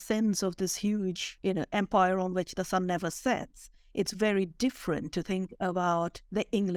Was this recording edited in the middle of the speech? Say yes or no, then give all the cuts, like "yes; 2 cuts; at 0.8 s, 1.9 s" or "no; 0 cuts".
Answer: no; 0 cuts